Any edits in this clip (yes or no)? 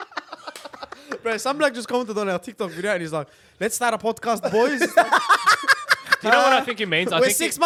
no